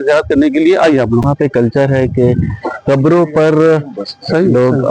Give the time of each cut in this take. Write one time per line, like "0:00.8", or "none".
0:01.3